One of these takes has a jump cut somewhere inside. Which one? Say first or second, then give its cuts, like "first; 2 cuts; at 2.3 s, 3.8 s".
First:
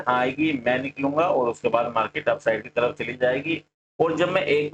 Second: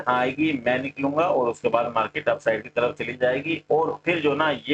first; 1 cut; at 3.6 s